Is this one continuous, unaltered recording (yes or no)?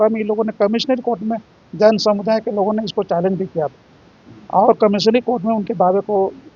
yes